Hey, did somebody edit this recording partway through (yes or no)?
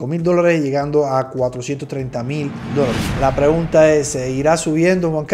no